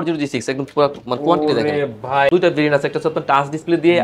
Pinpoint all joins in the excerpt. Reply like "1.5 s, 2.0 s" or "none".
2.3 s